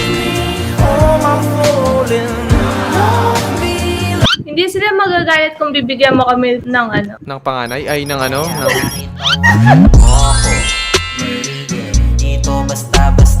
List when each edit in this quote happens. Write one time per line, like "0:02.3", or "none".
0:04.4